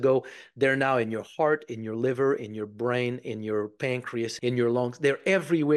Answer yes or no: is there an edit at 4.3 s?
yes